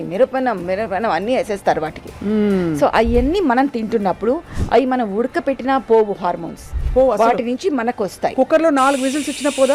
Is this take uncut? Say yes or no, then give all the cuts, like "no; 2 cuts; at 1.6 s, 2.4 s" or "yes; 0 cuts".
yes; 0 cuts